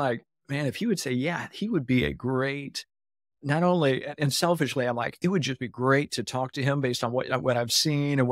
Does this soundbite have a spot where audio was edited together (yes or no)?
no